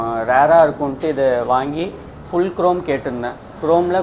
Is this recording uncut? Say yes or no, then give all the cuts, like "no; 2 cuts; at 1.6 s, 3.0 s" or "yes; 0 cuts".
yes; 0 cuts